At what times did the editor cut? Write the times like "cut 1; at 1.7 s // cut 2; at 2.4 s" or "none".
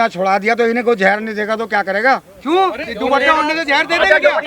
none